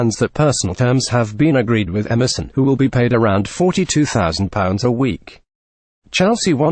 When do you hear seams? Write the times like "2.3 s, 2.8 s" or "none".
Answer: none